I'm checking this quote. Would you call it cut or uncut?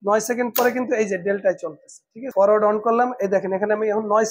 cut